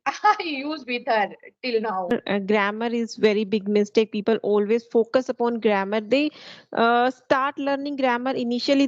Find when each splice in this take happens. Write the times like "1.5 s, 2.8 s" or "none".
2.1 s

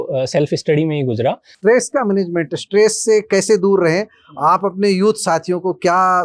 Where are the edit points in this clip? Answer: 1.6 s

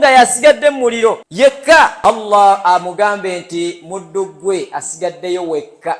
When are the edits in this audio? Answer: 0.8 s, 2.0 s

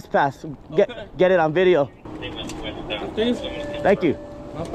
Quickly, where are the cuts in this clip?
2.1 s

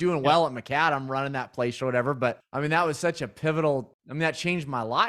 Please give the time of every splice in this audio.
2.5 s, 4.0 s

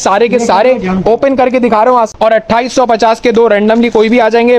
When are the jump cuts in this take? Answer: 2.1 s

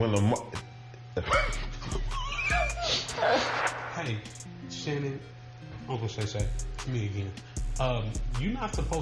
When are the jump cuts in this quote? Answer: 3.5 s

